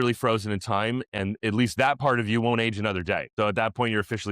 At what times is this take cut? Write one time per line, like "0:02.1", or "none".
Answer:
0:03.3